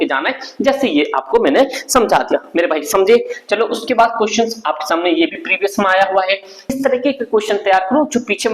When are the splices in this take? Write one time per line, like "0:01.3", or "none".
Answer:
0:06.7